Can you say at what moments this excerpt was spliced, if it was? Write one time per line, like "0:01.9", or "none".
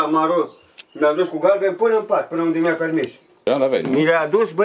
0:03.4

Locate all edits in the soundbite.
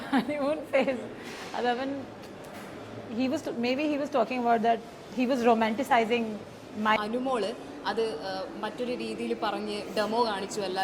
0:07.0

